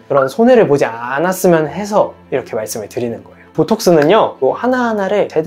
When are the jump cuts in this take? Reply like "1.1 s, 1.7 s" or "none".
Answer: 3.5 s, 4.4 s

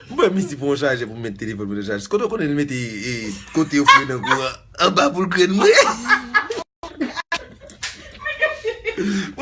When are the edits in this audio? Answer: 1.7 s

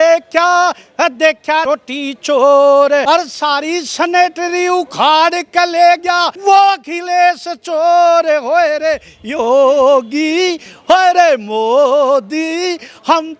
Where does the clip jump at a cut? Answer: 1.6 s, 3.0 s, 6.3 s

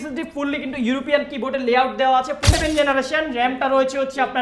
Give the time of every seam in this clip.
2.4 s

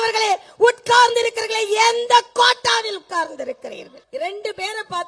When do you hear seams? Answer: 3.9 s

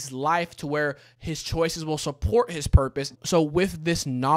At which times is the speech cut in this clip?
3.1 s

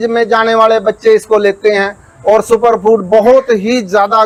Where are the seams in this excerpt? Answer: none

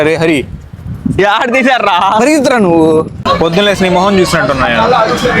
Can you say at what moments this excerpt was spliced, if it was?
3.2 s

